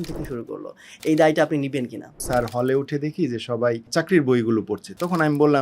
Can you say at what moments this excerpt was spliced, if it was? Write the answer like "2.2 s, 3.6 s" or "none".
2.2 s, 3.9 s